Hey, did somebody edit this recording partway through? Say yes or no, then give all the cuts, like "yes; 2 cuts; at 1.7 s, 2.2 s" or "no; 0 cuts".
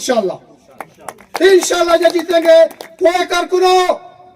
yes; 1 cut; at 3.3 s